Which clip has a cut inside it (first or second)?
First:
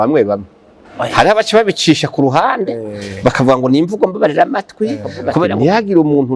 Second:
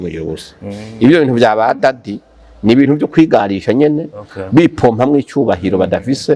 first